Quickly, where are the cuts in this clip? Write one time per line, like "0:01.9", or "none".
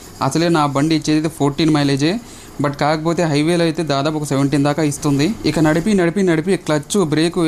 none